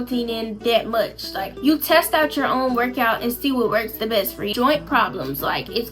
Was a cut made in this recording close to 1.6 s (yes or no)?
yes